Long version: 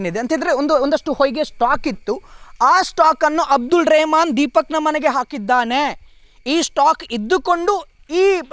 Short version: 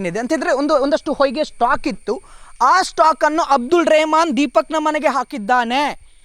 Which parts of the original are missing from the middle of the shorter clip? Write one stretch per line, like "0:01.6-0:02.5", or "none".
none